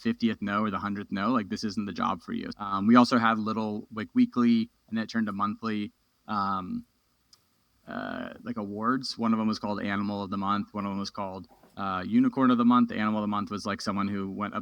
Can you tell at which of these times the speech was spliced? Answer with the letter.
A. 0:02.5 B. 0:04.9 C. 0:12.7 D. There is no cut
A